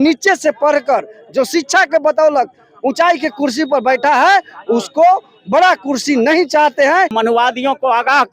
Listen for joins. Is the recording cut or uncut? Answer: cut